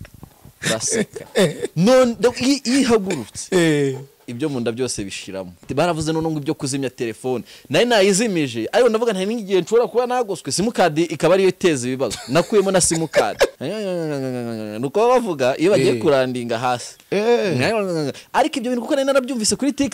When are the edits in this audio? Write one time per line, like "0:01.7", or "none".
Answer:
0:05.6
0:13.6